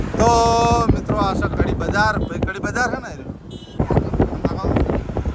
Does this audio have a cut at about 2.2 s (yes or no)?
no